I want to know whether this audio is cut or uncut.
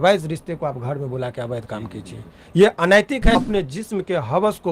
cut